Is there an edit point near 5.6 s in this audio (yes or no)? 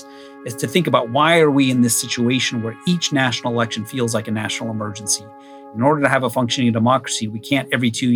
yes